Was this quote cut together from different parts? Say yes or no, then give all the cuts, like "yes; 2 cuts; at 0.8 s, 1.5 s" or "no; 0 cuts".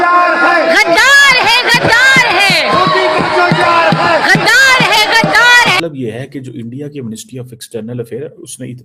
yes; 1 cut; at 5.8 s